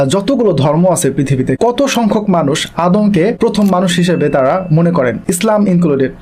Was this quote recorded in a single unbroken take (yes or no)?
no